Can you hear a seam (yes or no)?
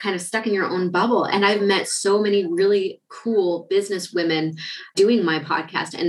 yes